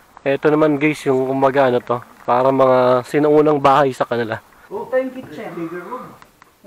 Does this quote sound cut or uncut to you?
cut